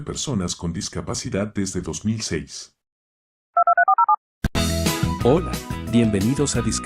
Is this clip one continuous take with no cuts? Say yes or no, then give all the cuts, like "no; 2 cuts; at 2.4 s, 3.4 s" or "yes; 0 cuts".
no; 1 cut; at 4.4 s